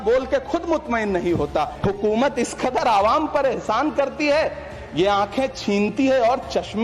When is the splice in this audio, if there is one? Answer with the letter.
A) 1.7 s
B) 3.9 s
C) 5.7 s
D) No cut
A